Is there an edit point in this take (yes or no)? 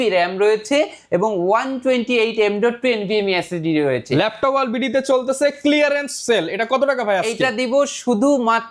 no